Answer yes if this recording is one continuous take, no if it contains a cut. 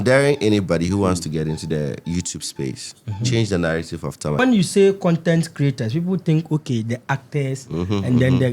no